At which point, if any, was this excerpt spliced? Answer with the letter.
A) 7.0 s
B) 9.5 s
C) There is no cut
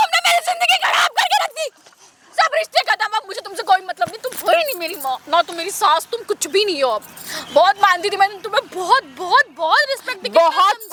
C